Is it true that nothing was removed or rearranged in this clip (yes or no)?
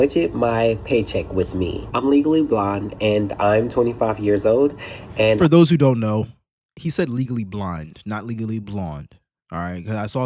no